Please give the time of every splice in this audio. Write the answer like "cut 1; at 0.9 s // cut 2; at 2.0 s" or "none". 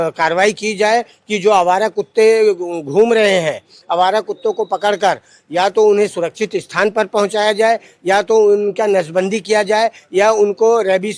none